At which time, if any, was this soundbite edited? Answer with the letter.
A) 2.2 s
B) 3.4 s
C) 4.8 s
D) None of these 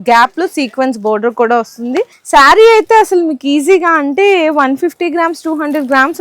A